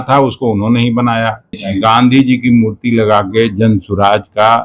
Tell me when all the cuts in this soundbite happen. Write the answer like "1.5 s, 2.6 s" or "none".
1.6 s